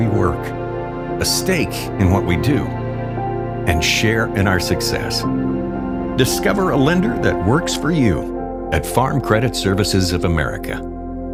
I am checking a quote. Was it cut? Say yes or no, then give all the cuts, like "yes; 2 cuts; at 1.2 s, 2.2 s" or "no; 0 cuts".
no; 0 cuts